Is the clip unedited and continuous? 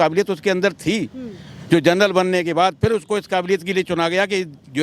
yes; 0 cuts

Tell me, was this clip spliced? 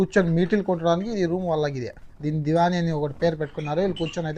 no; 0 cuts

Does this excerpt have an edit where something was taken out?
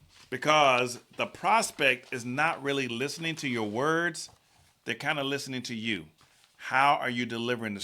no; 0 cuts

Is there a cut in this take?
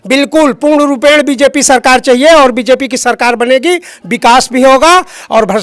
no; 0 cuts

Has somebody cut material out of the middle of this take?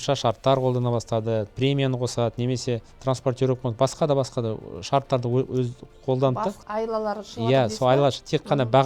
yes; 2 cuts; at 1.5 s, 6.6 s

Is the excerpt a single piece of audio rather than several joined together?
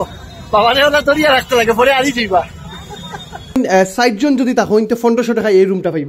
no; 1 cut; at 3.4 s

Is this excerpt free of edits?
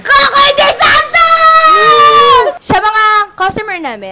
no; 1 cut; at 2.6 s

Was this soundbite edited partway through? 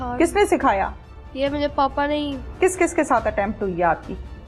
yes; 1 cut; at 2.5 s

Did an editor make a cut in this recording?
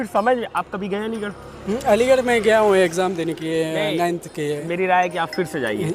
no; 0 cuts

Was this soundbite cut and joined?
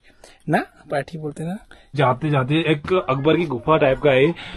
yes; 1 cut; at 1.9 s

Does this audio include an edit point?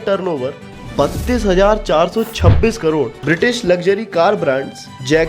yes; 1 cut; at 3.2 s

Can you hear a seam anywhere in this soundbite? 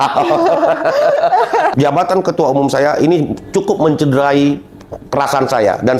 yes; 1 cut; at 1.7 s

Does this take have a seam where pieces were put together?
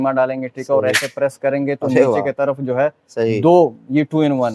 no; 0 cuts

